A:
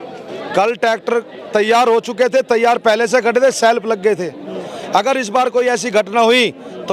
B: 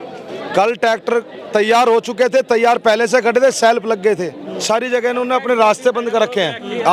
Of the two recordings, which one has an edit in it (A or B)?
B